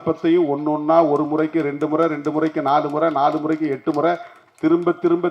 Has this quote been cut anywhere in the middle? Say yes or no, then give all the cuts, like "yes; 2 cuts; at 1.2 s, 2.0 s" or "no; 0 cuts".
no; 0 cuts